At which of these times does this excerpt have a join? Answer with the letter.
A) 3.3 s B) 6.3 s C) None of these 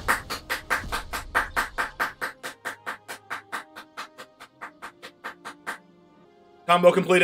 B